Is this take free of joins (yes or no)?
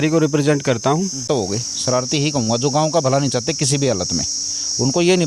no